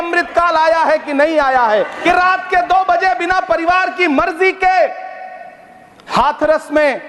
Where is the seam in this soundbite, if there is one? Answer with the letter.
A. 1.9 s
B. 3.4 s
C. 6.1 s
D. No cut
A